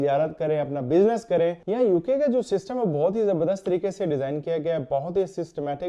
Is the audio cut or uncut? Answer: cut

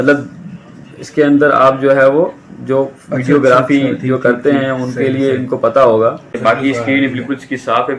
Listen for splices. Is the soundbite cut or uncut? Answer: cut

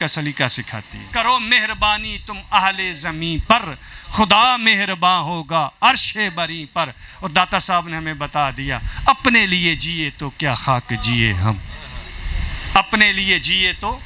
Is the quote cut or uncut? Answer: cut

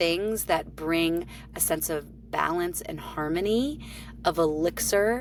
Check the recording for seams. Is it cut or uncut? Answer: uncut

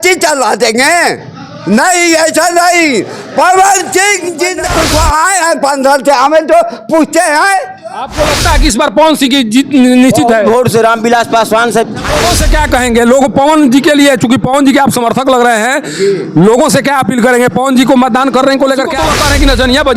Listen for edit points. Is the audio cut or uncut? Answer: cut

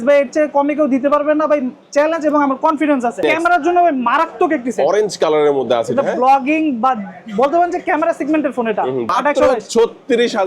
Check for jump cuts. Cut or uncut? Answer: cut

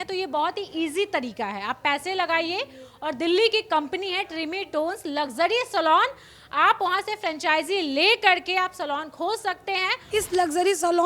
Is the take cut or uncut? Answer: cut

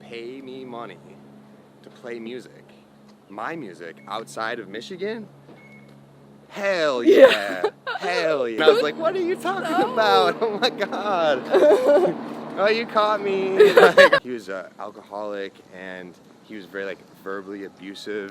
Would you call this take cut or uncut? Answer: cut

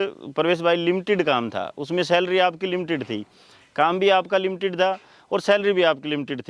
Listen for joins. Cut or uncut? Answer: uncut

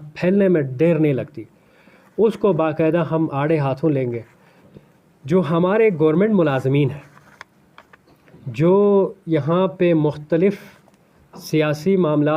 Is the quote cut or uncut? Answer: cut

